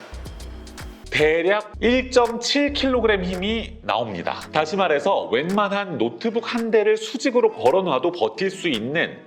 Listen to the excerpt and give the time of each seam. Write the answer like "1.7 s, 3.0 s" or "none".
1.0 s